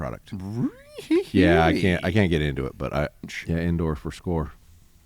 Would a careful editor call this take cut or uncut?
cut